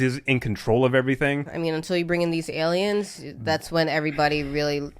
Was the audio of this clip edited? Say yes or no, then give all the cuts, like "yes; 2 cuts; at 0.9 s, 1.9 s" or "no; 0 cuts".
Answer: yes; 1 cut; at 1.5 s